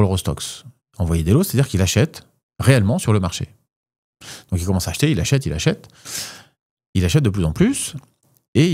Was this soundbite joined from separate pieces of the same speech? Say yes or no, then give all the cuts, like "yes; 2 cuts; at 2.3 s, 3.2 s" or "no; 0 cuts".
no; 0 cuts